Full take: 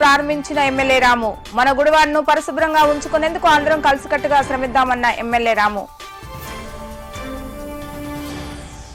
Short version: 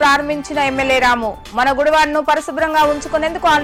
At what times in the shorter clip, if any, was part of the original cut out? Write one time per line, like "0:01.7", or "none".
none